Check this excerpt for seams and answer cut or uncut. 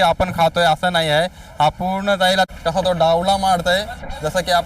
cut